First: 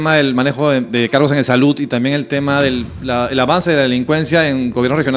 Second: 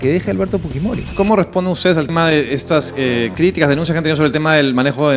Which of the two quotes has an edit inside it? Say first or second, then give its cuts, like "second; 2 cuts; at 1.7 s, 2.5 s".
second; 2 cuts; at 1.0 s, 3.3 s